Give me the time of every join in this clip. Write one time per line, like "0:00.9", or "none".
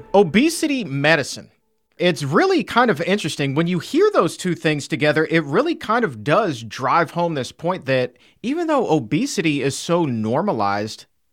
0:01.9